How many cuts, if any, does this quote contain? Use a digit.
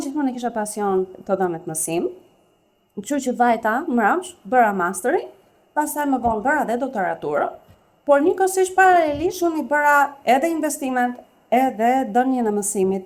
0